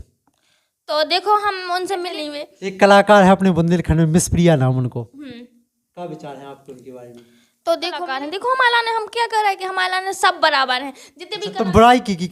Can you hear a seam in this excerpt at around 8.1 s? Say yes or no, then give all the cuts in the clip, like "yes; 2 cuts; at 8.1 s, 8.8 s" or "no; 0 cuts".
yes; 2 cuts; at 2.2 s, 8.1 s